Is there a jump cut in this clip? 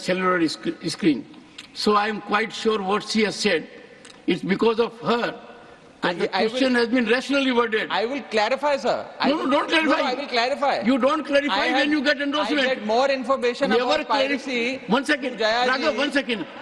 no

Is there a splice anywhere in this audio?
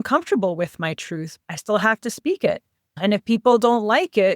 yes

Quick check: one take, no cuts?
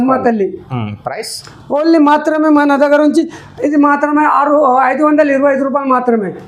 yes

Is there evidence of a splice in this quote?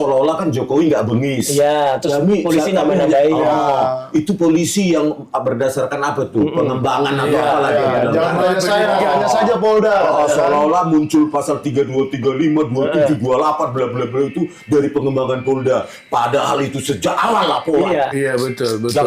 no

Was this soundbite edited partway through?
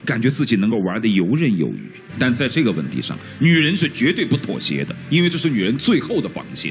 no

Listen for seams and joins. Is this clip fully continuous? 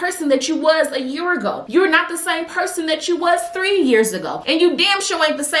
yes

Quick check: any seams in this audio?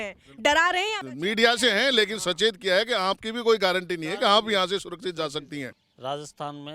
yes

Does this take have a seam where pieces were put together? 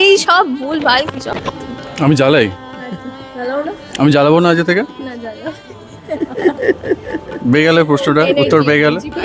no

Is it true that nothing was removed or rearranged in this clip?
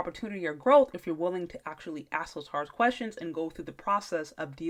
yes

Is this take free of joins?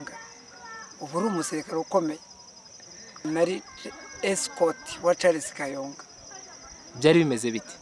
no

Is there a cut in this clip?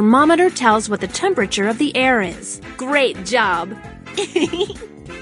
yes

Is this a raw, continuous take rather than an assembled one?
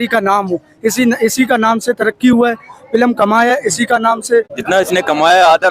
no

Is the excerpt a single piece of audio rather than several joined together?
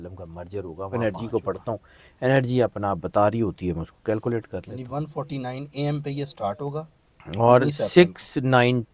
no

